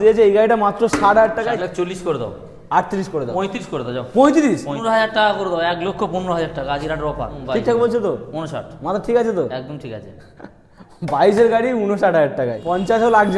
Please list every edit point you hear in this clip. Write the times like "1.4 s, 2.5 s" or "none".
1.5 s, 4.8 s, 7.4 s, 12.6 s